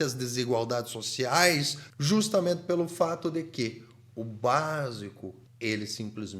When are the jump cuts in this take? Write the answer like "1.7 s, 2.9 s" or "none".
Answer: 1.9 s, 5.4 s